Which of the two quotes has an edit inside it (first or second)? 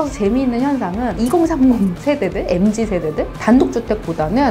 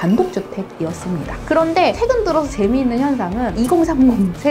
second